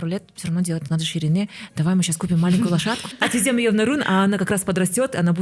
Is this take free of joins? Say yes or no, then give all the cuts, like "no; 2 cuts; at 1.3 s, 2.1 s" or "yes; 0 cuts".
no; 1 cut; at 3.1 s